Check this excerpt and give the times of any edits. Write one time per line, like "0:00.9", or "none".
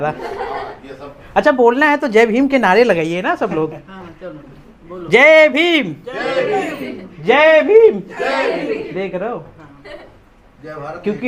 none